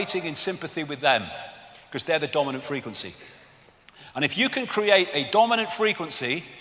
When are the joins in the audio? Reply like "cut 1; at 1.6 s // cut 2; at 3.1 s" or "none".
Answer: none